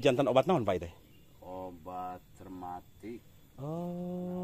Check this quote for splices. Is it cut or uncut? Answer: uncut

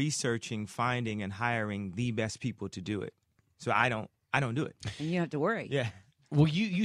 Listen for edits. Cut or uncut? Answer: cut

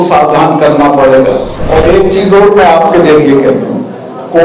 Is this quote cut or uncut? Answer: cut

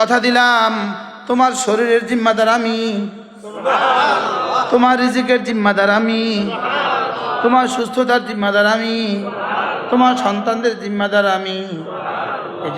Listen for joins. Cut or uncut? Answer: uncut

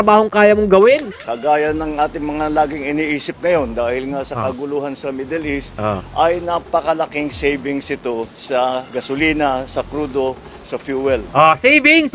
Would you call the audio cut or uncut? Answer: cut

